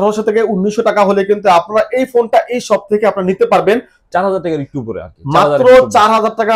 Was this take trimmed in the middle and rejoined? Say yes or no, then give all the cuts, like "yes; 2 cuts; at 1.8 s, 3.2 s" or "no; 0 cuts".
yes; 1 cut; at 4.0 s